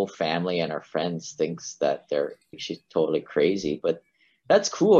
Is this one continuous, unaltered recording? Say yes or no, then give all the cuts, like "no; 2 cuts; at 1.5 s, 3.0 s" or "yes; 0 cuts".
no; 1 cut; at 2.5 s